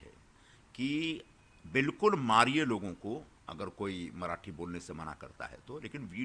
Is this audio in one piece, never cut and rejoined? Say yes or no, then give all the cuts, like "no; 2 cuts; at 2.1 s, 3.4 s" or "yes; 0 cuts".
yes; 0 cuts